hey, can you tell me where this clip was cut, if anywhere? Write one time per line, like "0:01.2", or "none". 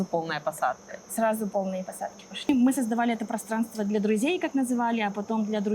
0:02.5